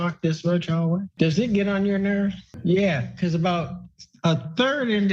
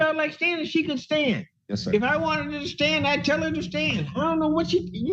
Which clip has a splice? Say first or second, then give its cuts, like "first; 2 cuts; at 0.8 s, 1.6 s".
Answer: first; 1 cut; at 1.1 s